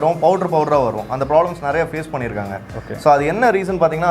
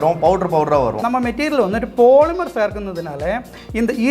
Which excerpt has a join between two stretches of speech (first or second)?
second